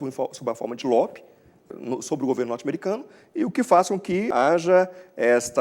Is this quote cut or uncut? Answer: cut